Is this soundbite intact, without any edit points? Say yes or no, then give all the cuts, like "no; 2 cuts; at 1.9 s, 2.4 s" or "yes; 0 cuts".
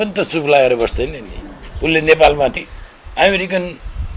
no; 1 cut; at 2.6 s